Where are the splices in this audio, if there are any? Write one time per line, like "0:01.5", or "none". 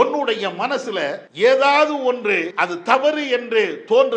0:01.2
0:03.0